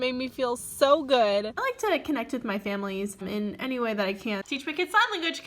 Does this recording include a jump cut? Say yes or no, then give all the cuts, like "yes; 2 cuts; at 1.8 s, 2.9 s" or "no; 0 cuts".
yes; 2 cuts; at 1.6 s, 4.4 s